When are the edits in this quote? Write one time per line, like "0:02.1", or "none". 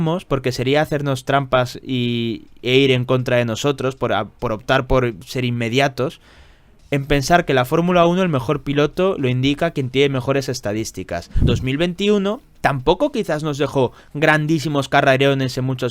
0:11.4